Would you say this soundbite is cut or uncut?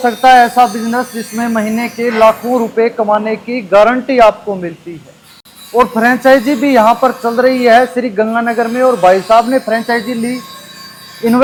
uncut